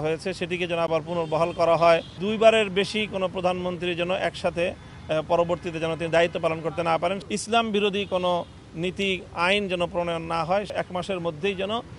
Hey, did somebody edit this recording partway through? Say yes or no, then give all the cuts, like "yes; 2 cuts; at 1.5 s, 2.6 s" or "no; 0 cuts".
yes; 3 cuts; at 2.2 s, 7.2 s, 10.7 s